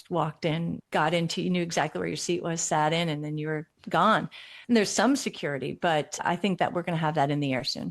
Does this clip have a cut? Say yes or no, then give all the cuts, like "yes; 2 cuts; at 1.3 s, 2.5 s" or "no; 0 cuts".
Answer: yes; 1 cut; at 6.2 s